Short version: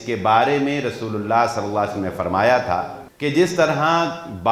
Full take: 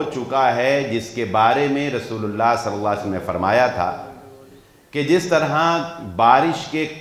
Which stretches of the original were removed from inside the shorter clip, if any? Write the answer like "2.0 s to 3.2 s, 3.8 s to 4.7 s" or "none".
4.1 s to 4.8 s